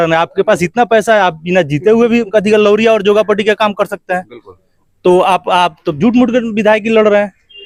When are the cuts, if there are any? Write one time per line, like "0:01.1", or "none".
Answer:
none